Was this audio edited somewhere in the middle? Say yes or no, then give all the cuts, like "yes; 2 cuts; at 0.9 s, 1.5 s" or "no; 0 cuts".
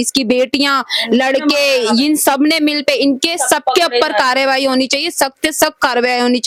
no; 0 cuts